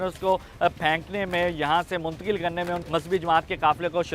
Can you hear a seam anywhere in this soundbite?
yes; 1 cut; at 2.8 s

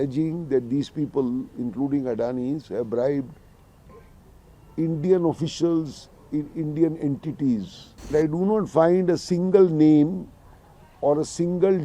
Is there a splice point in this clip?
yes; 1 cut; at 8.1 s

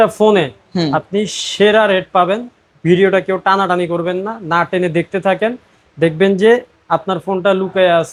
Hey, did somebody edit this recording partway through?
no; 0 cuts

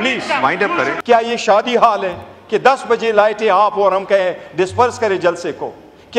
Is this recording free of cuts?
no; 1 cut; at 1.0 s

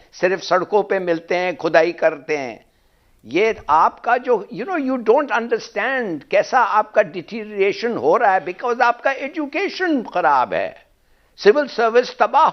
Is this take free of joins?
yes; 0 cuts

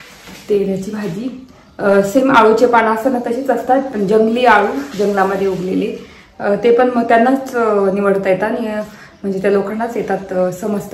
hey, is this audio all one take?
yes; 0 cuts

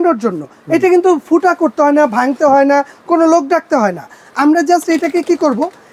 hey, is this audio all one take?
yes; 0 cuts

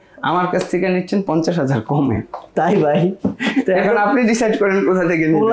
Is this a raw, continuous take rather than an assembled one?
yes; 0 cuts

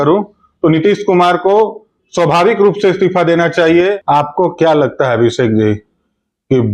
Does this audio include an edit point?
yes; 1 cut; at 4.0 s

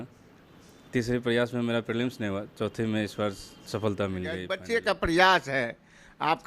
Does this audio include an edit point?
yes; 1 cut; at 4.5 s

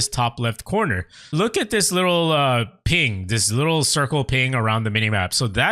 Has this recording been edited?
yes; 1 cut; at 1.3 s

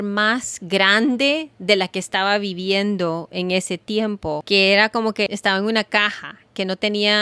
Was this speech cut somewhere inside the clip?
yes; 2 cuts; at 4.4 s, 5.3 s

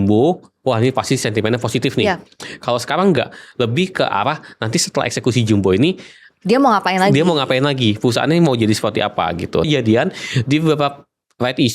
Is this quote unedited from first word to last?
no; 1 cut; at 9.7 s

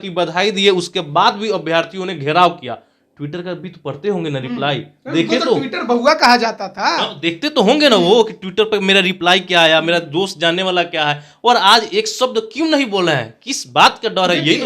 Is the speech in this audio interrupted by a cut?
no; 0 cuts

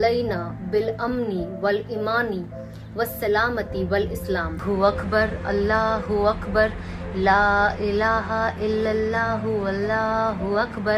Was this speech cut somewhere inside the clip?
no; 0 cuts

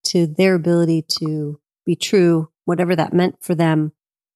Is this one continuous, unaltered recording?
yes; 0 cuts

